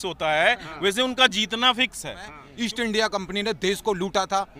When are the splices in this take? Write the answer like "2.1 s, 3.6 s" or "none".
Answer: 2.4 s